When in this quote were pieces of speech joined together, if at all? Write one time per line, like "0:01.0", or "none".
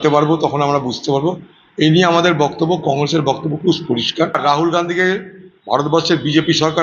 0:04.4

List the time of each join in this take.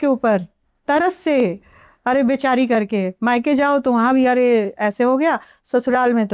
none

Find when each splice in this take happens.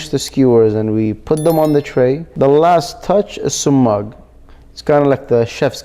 0:02.3

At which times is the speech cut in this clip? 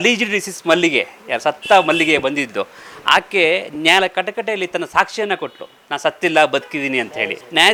none

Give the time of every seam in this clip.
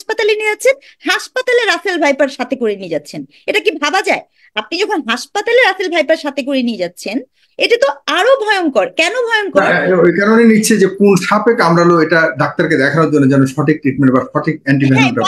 none

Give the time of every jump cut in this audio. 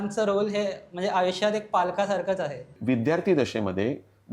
0:02.8

